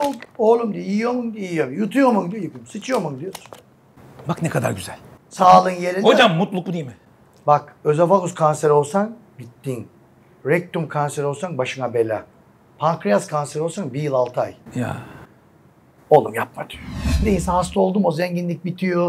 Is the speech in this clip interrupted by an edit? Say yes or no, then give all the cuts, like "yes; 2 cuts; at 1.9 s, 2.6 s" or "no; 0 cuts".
yes; 1 cut; at 17.2 s